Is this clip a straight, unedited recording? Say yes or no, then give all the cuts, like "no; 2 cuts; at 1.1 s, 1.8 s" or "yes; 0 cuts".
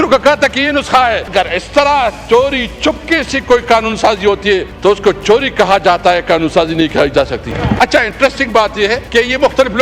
no; 4 cuts; at 1.3 s, 4.7 s, 7.6 s, 9.0 s